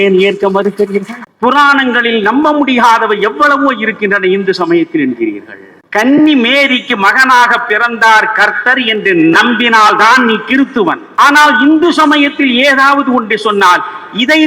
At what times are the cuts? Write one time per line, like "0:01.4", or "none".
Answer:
0:01.2
0:11.1